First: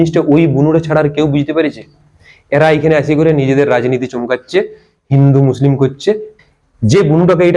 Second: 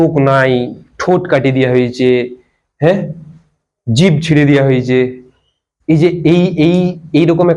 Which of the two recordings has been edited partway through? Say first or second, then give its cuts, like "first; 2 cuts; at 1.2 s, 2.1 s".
first; 1 cut; at 6.3 s